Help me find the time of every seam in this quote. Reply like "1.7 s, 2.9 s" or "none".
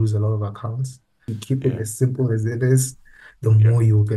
1.3 s